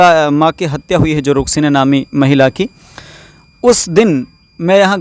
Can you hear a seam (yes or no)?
no